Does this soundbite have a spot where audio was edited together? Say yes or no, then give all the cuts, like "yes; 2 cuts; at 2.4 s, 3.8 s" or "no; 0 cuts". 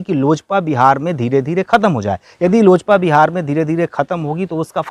no; 0 cuts